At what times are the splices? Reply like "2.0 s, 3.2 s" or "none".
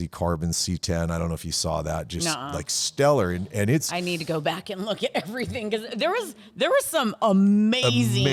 none